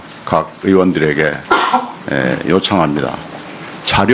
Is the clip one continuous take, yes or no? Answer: no